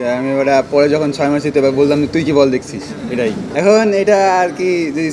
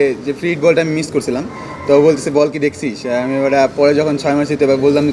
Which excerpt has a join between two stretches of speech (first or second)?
first